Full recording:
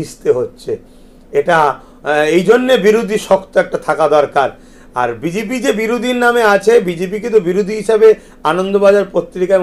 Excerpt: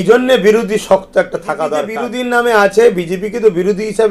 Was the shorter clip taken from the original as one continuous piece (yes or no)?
no